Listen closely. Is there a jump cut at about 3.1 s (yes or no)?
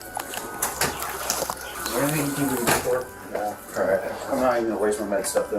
no